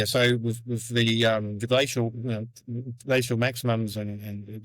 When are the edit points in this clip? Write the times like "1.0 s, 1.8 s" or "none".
none